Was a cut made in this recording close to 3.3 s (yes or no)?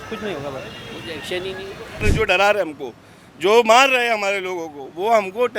no